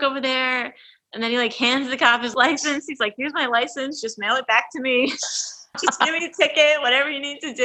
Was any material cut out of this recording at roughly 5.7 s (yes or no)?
yes